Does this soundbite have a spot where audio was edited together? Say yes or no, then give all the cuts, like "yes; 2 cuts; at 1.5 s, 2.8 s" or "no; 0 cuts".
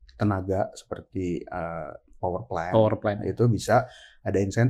no; 0 cuts